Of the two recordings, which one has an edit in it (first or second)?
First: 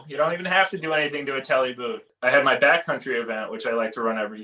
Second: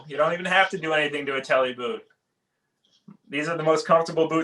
first